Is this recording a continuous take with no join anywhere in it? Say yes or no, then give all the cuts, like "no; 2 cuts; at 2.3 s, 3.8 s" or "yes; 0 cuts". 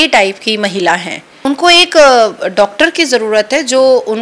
no; 1 cut; at 1.4 s